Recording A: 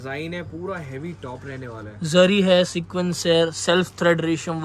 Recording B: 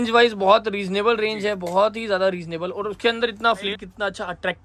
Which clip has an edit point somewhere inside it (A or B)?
B